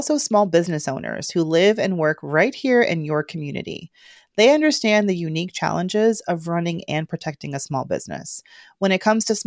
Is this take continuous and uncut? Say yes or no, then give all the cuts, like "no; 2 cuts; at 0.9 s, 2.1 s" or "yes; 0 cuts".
yes; 0 cuts